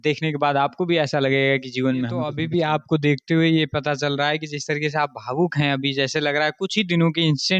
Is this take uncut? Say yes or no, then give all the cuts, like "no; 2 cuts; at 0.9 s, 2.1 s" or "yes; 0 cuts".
no; 1 cut; at 2.4 s